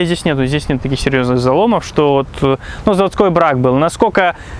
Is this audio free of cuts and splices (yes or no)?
yes